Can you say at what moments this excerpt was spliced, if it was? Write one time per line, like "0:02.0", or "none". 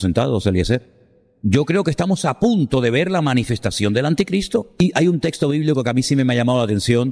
0:01.4
0:04.8